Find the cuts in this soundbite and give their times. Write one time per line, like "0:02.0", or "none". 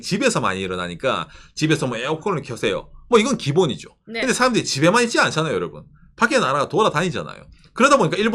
none